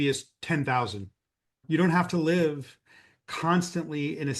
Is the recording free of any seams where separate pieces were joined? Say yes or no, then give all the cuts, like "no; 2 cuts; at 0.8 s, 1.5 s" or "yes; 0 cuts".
no; 1 cut; at 1.6 s